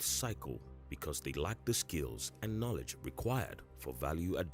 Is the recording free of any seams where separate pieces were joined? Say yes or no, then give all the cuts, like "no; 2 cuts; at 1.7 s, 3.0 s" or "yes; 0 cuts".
yes; 0 cuts